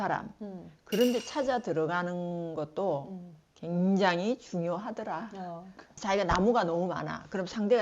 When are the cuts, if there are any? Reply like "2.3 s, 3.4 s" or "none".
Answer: 6.0 s